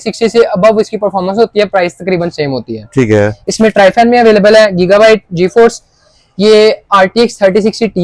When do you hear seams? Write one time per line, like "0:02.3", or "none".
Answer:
none